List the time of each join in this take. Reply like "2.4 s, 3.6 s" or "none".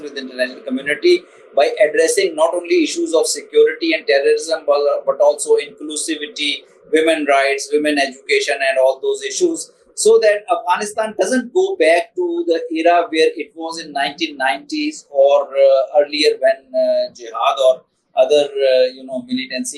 none